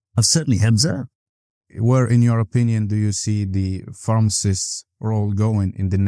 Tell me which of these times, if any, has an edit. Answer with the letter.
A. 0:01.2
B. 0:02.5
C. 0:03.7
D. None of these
A